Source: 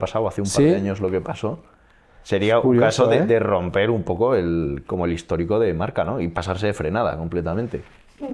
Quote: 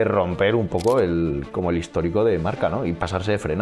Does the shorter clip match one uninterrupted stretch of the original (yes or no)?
yes